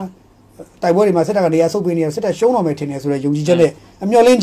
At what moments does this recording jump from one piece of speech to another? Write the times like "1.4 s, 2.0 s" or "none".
none